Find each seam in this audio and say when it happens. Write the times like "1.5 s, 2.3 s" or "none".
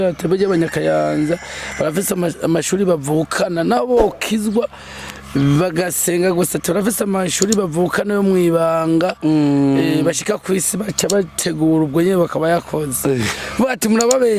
none